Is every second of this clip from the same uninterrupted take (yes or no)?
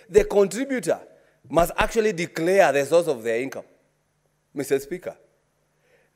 yes